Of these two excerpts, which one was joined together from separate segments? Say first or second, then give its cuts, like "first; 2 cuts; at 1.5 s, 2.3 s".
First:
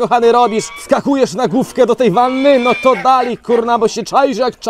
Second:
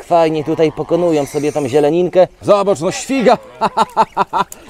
second; 1 cut; at 2.4 s